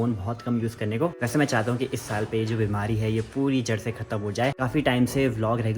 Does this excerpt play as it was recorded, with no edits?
no; 2 cuts; at 1.1 s, 4.6 s

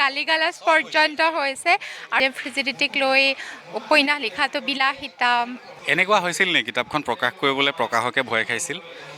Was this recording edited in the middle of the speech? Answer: yes; 2 cuts; at 2.2 s, 5.7 s

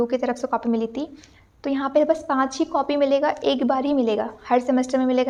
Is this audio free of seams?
yes; 0 cuts

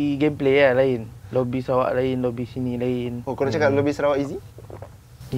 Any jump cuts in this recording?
yes; 2 cuts; at 1.2 s, 3.2 s

